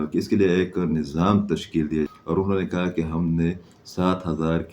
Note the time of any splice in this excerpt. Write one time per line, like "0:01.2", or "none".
0:02.1